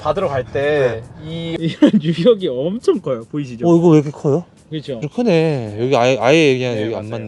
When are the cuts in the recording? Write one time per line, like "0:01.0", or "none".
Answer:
0:01.5
0:05.1